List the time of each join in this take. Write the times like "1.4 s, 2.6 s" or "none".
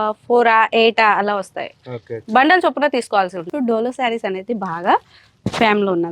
3.5 s